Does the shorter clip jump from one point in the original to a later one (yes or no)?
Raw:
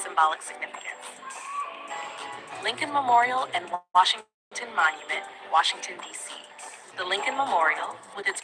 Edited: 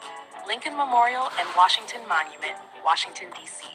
yes